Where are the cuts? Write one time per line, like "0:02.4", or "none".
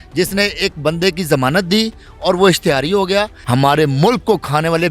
0:03.4